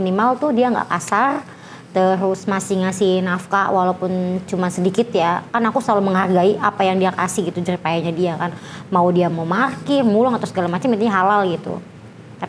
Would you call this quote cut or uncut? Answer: uncut